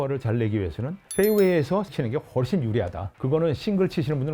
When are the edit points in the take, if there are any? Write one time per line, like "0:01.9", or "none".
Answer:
0:01.0
0:01.9
0:03.1